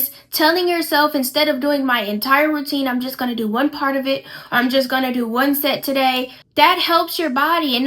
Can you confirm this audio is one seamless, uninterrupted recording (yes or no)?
no